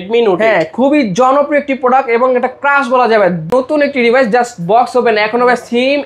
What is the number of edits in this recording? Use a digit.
1